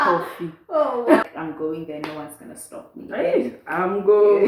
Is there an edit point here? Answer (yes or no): yes